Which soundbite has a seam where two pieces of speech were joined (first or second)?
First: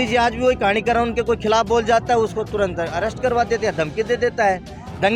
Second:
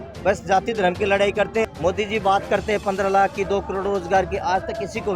second